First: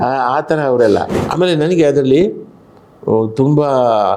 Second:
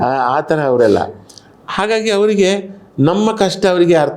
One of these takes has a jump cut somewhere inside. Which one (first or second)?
first